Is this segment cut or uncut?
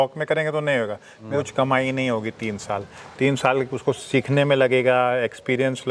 cut